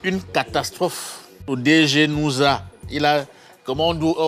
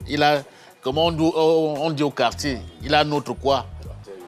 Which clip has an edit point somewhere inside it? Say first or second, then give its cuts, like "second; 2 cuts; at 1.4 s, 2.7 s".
first; 1 cut; at 1.5 s